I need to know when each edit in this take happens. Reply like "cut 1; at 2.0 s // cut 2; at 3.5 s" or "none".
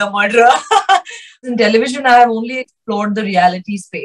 cut 1; at 1.5 s